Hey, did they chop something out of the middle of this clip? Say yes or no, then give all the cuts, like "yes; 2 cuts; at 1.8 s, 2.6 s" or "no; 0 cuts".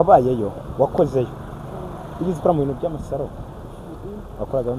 no; 0 cuts